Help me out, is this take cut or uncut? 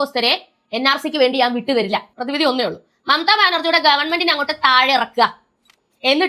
cut